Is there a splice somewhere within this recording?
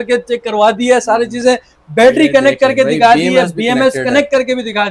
no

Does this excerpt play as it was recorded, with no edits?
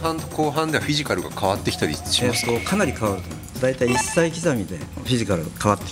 no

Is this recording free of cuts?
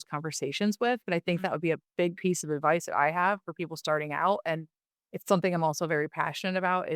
yes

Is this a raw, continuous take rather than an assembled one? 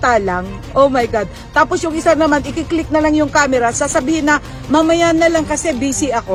yes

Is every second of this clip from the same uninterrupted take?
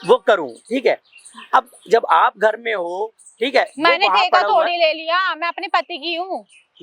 yes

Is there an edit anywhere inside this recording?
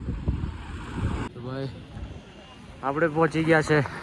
yes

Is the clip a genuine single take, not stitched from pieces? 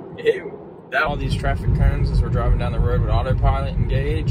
no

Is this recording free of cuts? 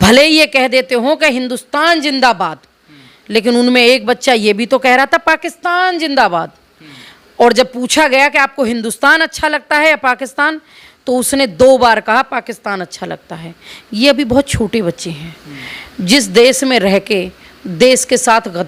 yes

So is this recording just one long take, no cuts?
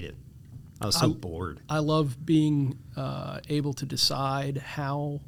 yes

